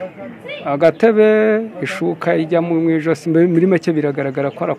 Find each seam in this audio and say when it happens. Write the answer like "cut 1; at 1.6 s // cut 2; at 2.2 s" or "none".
none